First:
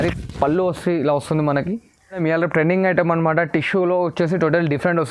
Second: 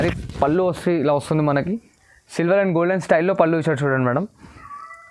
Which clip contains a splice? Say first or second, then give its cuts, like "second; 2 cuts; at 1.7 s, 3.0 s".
first; 1 cut; at 2.2 s